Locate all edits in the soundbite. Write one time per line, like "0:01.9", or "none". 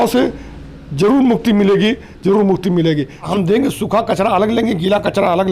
0:03.2